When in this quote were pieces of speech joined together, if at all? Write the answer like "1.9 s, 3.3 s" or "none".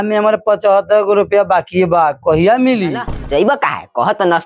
3.1 s